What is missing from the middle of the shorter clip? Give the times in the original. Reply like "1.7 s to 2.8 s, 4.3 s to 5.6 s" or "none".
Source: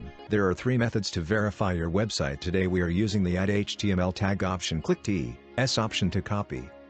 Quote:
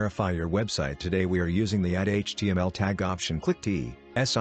none